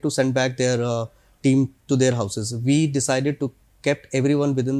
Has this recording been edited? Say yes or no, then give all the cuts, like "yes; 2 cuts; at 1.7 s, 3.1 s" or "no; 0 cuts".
no; 0 cuts